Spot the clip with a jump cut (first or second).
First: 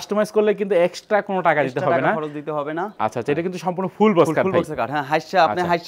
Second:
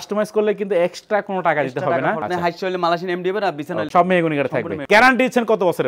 second